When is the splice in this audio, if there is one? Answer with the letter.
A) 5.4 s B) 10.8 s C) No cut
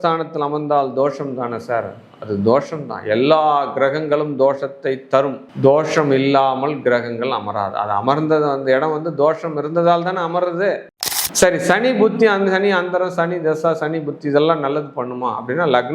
B